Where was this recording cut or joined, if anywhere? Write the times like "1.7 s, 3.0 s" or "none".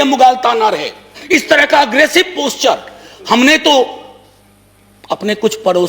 1.1 s